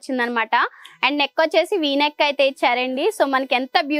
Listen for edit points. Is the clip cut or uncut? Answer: uncut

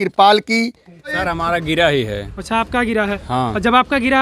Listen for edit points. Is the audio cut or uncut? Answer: cut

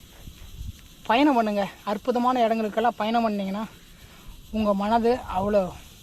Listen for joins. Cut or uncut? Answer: uncut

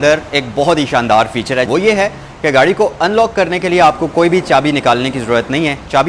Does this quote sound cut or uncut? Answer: cut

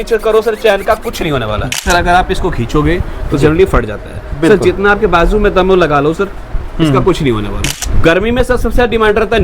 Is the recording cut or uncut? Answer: cut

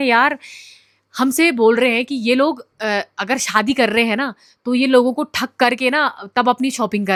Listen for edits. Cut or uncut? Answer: uncut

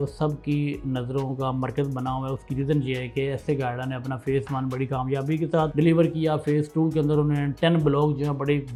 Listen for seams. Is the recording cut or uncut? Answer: uncut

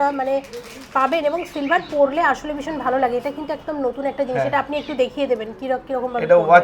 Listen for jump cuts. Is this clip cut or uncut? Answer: uncut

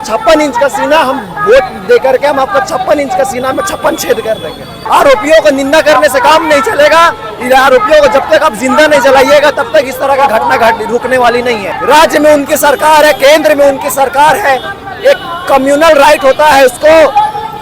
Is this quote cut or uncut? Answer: cut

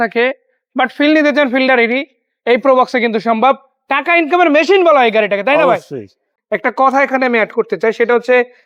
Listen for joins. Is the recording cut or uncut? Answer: cut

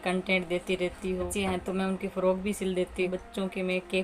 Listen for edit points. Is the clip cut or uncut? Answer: cut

